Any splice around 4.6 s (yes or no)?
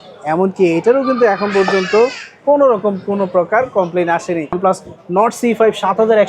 yes